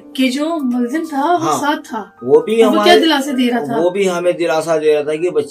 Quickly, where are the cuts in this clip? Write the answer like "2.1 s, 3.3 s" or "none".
none